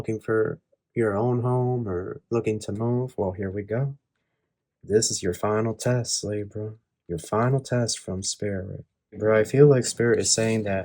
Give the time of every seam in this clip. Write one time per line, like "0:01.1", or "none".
0:09.2